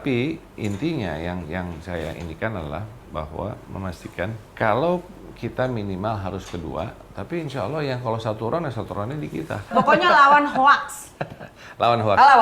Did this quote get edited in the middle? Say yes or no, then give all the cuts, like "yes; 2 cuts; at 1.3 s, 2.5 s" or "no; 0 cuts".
yes; 2 cuts; at 4.4 s, 9.7 s